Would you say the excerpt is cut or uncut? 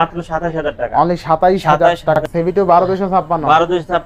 cut